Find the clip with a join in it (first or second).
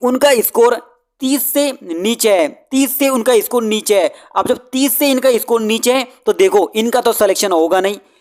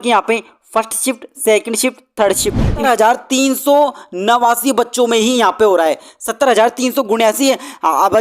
second